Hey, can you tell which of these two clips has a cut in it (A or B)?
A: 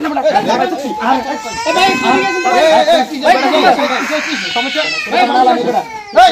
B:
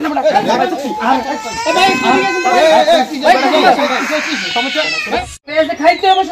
B